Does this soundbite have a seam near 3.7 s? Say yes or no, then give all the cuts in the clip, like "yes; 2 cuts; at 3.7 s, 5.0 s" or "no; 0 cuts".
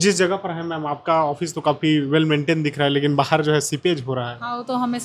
no; 0 cuts